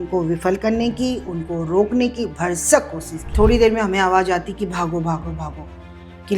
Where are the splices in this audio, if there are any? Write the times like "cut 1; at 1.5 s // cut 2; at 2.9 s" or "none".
cut 1; at 3.3 s